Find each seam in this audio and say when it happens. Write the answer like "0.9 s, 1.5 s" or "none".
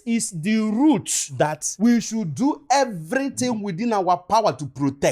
none